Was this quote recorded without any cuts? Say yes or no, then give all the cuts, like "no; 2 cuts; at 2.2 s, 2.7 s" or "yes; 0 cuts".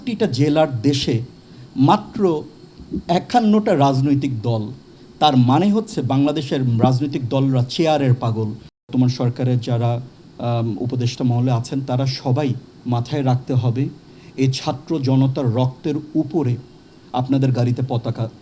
no; 2 cuts; at 8.9 s, 12.7 s